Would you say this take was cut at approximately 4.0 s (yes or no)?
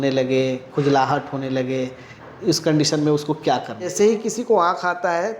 yes